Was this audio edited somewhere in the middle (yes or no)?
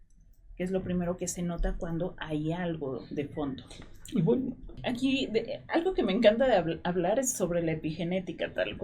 yes